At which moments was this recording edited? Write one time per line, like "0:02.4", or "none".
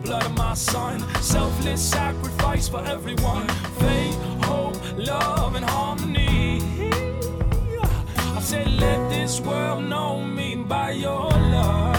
none